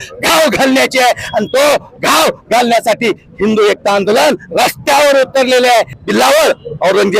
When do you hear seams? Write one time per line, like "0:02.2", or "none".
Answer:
0:05.9